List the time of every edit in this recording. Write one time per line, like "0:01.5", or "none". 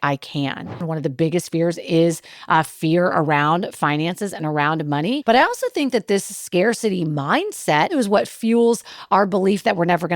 0:00.9
0:05.2
0:07.9